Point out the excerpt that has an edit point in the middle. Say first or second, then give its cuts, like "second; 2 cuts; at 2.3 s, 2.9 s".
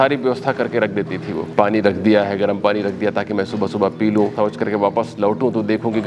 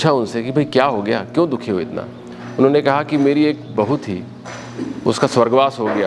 first; 2 cuts; at 1.5 s, 4.3 s